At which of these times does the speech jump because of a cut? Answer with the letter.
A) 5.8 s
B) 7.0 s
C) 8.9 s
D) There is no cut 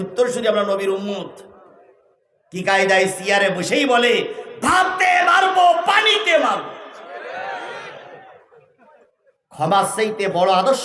C